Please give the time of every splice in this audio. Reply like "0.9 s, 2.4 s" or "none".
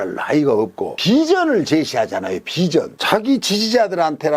none